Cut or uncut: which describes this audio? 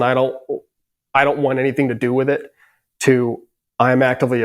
uncut